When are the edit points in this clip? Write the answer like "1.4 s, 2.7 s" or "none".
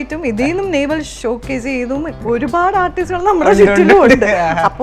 1.1 s, 2.2 s